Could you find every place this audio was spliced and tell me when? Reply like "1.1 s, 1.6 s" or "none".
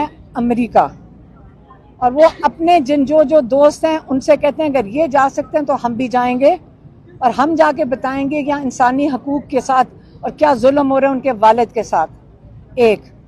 none